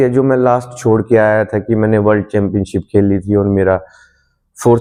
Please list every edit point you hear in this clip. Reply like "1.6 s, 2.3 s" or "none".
none